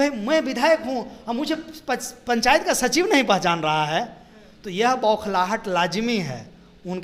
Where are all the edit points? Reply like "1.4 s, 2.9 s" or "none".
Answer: none